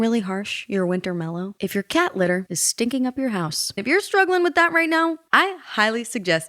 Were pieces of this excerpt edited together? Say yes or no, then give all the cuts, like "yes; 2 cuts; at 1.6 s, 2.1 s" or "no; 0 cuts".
yes; 1 cut; at 3.8 s